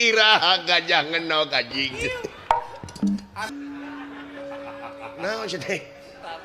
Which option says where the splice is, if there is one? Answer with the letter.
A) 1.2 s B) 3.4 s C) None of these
B